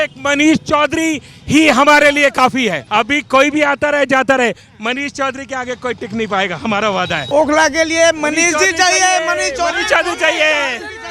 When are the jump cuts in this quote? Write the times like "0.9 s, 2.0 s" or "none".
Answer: 2.8 s, 7.2 s